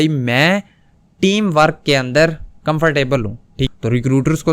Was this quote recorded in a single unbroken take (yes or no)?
no